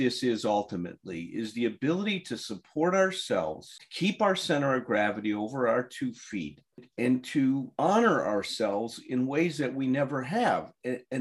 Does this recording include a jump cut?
no; 0 cuts

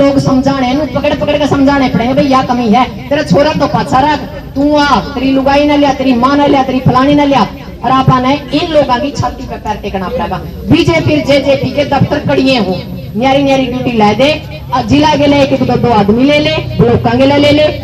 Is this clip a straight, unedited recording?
yes; 0 cuts

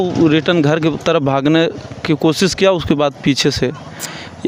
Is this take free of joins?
yes; 0 cuts

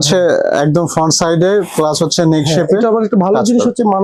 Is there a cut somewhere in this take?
no; 0 cuts

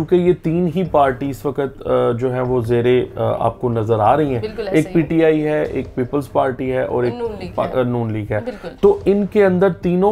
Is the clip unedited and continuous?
yes; 0 cuts

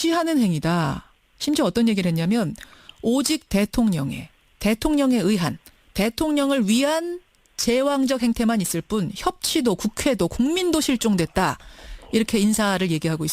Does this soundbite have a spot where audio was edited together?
yes; 1 cut; at 10.5 s

